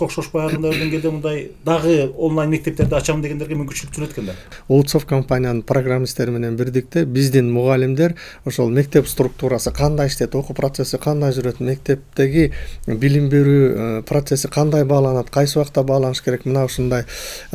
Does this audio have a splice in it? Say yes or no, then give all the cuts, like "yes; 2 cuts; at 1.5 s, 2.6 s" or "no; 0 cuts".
yes; 1 cut; at 4.4 s